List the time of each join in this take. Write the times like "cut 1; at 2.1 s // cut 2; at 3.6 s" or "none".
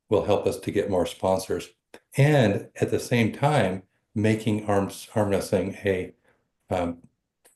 none